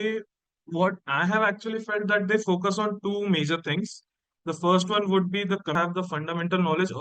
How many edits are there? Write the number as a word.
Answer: one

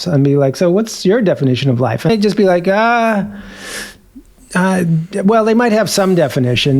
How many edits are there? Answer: one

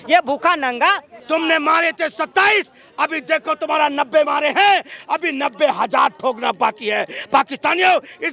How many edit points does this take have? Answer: one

